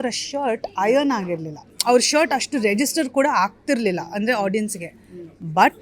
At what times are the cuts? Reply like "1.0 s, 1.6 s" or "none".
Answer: 1.7 s